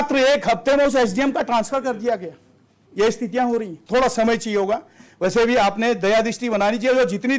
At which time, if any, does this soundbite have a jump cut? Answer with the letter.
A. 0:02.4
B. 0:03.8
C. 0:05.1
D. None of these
B